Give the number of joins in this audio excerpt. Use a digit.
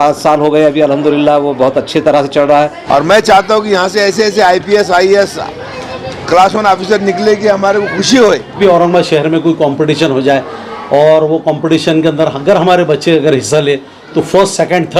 2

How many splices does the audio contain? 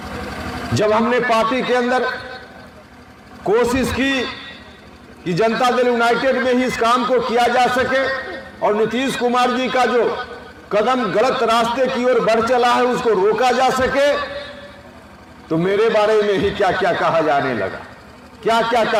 0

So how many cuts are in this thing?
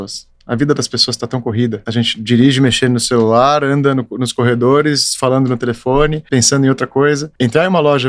3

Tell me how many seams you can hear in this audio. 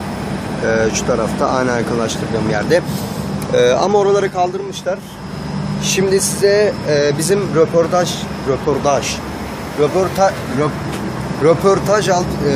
0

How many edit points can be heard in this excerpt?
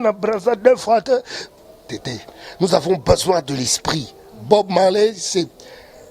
0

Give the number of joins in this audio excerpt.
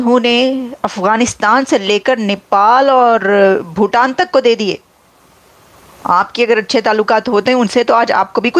0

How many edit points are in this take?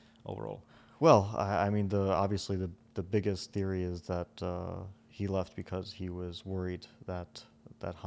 0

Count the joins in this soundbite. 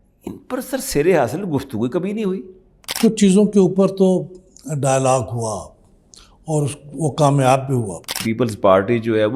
2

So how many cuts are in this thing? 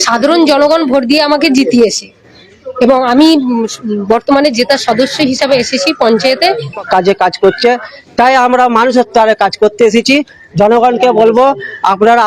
1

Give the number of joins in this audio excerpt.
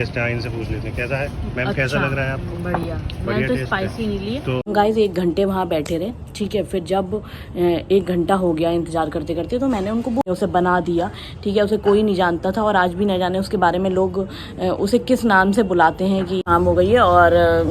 3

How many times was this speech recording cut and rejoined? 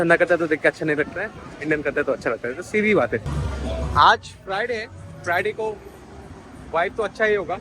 1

